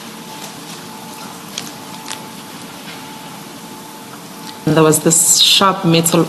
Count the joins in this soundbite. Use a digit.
1